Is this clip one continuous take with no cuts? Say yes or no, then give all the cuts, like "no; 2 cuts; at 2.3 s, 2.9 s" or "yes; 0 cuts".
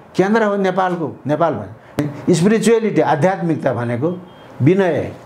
no; 1 cut; at 2.0 s